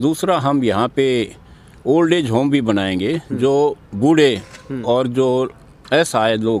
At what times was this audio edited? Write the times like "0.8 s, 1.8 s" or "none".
none